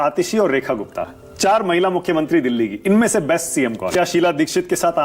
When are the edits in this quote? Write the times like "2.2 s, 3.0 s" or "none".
3.9 s